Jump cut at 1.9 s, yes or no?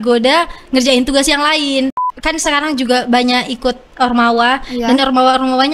yes